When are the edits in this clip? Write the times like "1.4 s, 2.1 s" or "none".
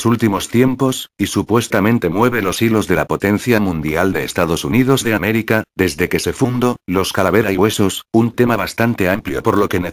none